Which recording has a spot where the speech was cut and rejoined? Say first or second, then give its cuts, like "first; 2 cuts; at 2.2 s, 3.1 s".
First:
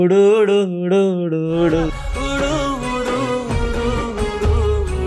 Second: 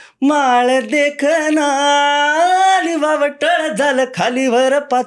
first; 1 cut; at 2.0 s